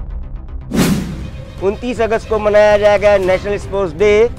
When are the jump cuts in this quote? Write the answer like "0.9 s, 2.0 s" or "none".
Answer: none